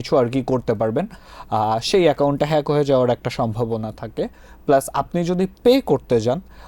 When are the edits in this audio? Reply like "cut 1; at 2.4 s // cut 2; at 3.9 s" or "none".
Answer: none